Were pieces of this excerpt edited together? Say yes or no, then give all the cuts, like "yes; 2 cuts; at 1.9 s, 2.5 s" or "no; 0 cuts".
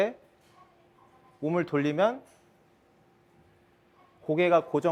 no; 0 cuts